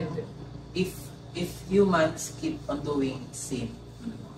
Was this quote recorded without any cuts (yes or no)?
yes